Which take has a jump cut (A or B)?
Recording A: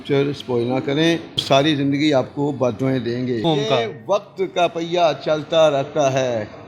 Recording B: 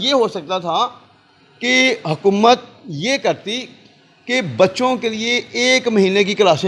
A